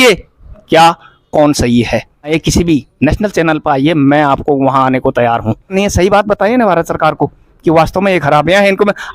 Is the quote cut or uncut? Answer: cut